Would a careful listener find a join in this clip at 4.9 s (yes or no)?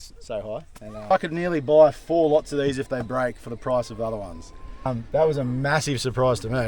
yes